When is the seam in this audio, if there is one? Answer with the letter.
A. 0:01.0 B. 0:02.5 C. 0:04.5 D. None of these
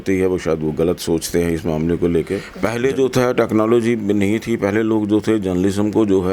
B